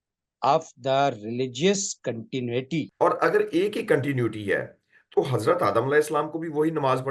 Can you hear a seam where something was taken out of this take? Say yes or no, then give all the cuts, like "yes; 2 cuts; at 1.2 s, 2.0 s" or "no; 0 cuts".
yes; 1 cut; at 2.9 s